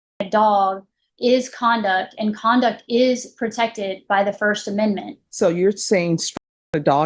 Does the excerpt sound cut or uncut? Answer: cut